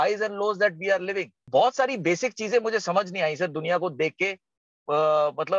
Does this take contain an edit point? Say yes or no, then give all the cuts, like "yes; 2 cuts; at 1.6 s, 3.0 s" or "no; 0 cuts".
yes; 1 cut; at 1.3 s